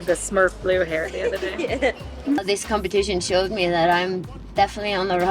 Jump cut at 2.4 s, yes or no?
yes